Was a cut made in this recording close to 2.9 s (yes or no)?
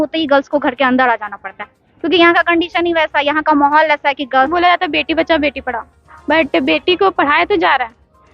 no